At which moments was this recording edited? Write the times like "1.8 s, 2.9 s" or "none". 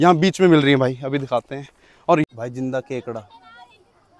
2.2 s